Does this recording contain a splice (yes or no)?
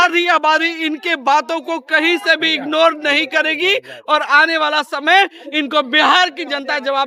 no